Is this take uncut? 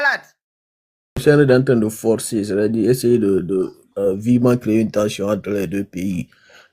no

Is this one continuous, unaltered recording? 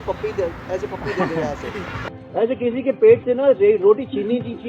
no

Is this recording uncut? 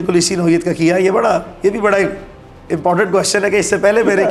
yes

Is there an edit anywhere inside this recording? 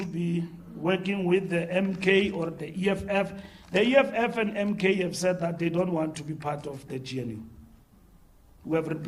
no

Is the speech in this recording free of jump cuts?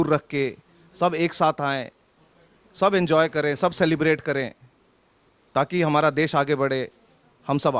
yes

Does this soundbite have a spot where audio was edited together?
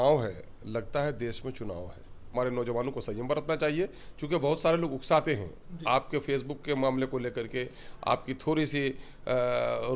yes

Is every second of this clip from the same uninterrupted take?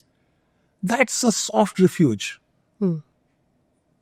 yes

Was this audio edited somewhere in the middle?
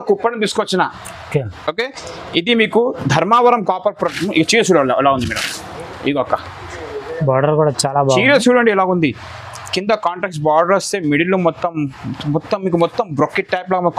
no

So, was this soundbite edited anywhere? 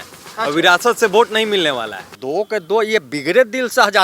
yes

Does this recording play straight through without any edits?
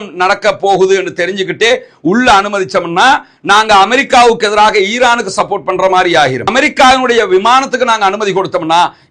yes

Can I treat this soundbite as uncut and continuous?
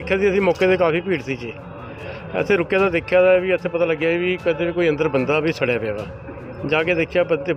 yes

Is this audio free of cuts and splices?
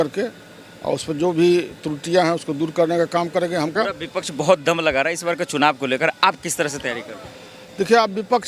no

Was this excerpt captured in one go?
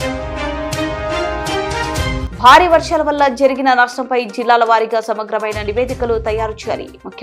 yes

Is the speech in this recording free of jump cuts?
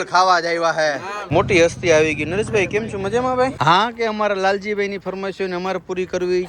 no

